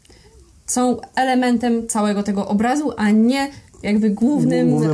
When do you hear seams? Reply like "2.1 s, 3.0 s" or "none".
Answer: none